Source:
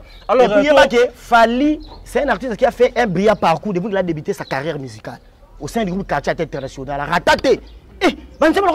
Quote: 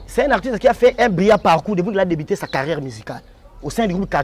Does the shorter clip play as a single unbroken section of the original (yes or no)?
yes